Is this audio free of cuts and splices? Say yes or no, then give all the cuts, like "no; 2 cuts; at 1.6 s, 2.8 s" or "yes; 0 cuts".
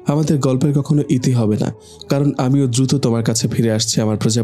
yes; 0 cuts